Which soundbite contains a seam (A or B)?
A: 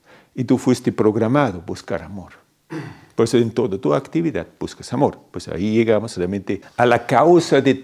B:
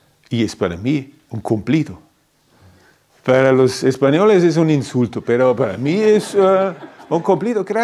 A